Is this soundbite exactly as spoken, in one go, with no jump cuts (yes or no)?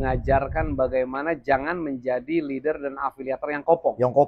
yes